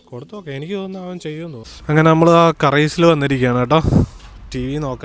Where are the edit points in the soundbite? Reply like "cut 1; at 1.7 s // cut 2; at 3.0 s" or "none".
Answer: cut 1; at 1.7 s